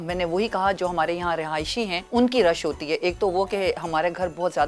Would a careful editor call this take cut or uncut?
cut